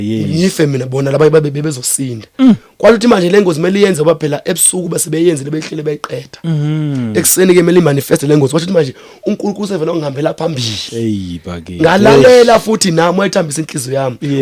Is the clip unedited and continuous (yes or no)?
yes